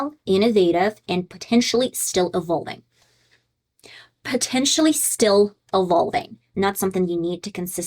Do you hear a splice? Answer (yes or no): yes